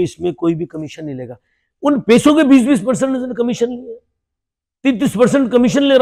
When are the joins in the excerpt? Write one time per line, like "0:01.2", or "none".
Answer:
none